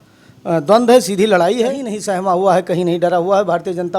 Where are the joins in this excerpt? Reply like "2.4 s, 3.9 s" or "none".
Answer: 1.9 s